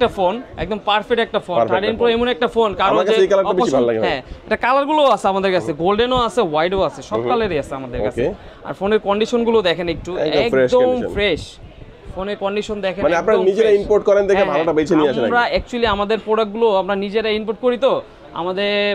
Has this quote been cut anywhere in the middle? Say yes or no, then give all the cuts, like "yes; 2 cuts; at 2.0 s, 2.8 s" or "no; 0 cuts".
no; 0 cuts